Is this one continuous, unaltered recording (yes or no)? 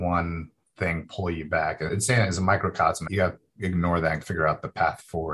no